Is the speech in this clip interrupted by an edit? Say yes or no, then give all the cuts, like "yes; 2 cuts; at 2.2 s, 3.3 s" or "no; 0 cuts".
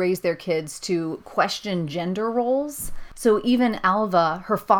yes; 1 cut; at 3.2 s